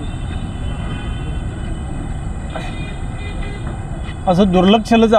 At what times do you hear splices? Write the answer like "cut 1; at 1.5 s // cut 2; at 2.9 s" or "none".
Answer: none